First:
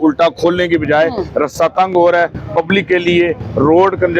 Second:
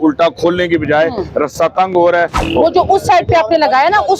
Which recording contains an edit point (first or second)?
second